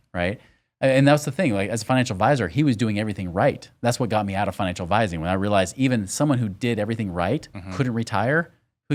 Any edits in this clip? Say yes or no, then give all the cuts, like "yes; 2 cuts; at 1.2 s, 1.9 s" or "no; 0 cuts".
no; 0 cuts